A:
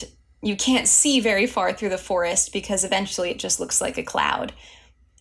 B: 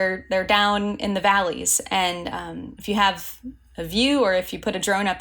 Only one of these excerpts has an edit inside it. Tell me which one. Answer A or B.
B